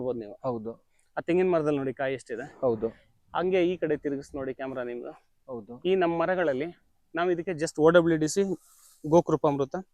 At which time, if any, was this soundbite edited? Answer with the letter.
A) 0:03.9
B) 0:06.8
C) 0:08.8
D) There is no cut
D